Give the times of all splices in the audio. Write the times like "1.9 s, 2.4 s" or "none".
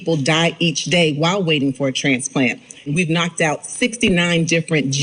2.9 s